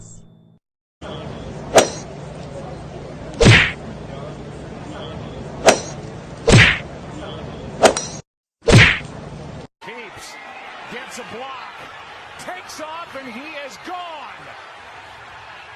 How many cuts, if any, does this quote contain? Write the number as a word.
one